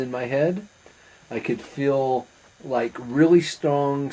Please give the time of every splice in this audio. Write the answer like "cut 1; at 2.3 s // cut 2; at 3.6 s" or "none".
none